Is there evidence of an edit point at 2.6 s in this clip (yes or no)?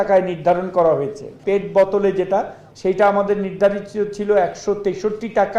yes